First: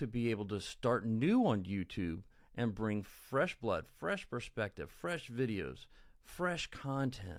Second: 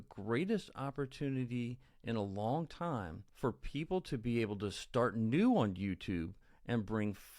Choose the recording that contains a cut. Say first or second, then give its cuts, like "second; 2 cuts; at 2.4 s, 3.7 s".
second; 1 cut; at 3.2 s